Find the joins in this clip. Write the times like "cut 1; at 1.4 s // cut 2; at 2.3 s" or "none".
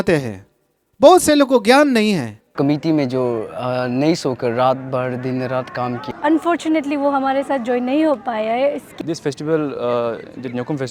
cut 1; at 2.5 s // cut 2; at 6.1 s // cut 3; at 9.0 s